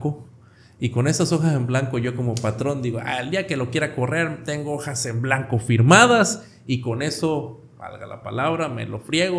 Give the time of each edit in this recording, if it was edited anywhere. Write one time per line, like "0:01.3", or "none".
none